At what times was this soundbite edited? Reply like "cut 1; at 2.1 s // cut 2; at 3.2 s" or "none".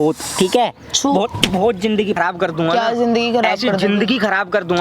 cut 1; at 2.1 s